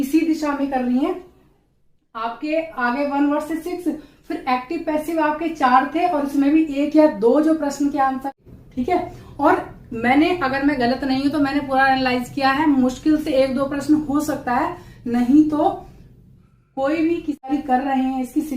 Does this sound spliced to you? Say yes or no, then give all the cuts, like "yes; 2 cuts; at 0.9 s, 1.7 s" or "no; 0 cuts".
yes; 2 cuts; at 8.4 s, 17.5 s